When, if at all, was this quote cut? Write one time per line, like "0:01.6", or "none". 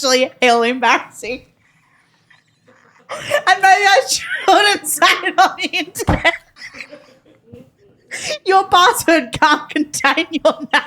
0:06.5